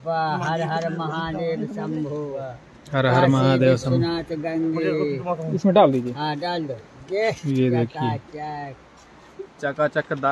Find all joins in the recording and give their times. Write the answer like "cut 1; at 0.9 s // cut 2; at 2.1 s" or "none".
none